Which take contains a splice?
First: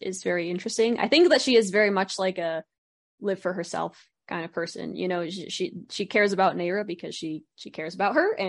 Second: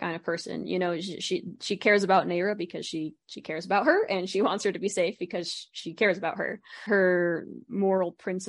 second; 1 cut; at 6.9 s

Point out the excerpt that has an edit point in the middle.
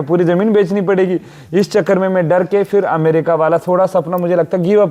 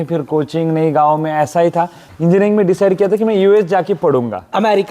second; 1 cut; at 2.0 s

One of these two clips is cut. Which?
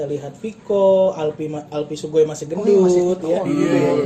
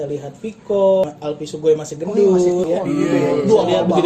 second; 2 cuts; at 1.0 s, 2.7 s

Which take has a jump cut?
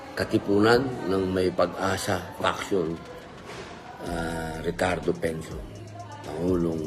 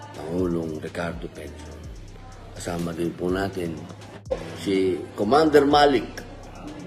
second; 1 cut; at 4.3 s

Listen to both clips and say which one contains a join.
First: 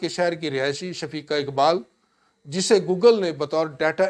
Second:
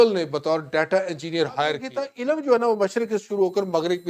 second; 1 cut; at 2.1 s

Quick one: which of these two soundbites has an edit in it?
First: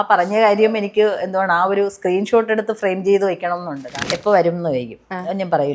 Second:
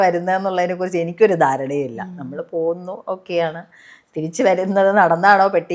first; 1 cut; at 3.9 s

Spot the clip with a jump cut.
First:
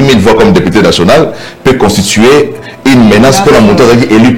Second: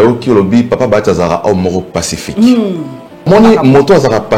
second; 1 cut; at 3.3 s

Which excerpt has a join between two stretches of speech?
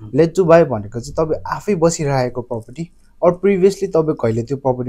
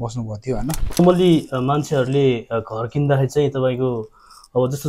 second; 1 cut; at 1.0 s

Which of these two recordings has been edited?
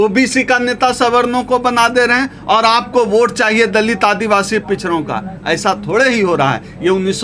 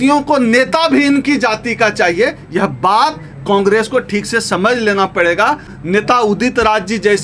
second; 1 cut; at 5.7 s

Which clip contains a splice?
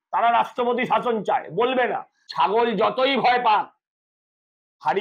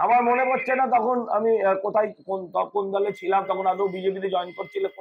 first; 1 cut; at 2.2 s

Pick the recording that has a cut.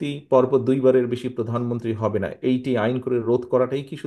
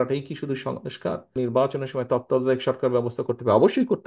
second; 1 cut; at 1.4 s

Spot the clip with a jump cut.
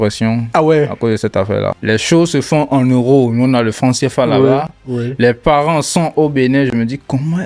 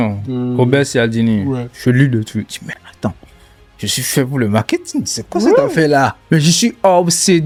first; 1 cut; at 1.8 s

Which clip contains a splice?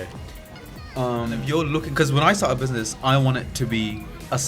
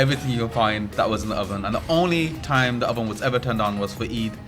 first; 1 cut; at 1.4 s

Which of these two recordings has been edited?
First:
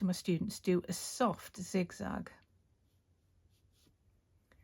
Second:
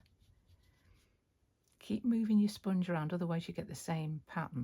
second; 1 cut; at 1.0 s

